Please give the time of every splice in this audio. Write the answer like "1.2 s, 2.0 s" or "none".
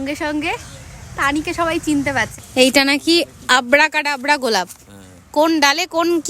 2.3 s